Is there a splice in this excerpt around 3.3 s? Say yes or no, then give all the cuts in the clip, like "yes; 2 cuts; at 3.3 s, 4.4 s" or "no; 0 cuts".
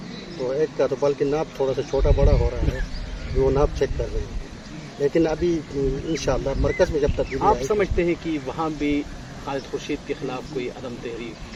no; 0 cuts